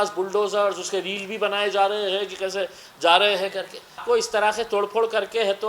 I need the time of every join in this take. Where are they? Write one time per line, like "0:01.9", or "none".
0:04.0

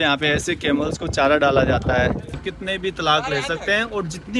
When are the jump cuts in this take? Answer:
0:02.4

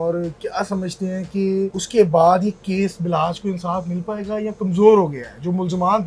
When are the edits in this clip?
0:01.8

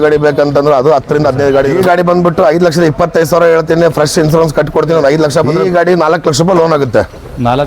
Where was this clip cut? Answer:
0:01.8
0:05.6

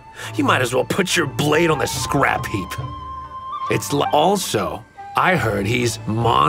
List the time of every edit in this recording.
0:04.1

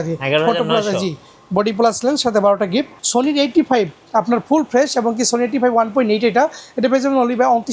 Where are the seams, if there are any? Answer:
0:02.9

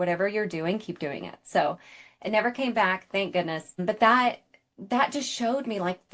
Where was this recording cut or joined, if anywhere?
0:03.8

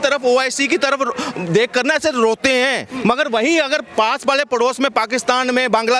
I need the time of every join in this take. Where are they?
0:02.9

